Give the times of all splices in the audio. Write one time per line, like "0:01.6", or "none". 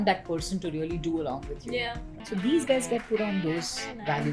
0:02.2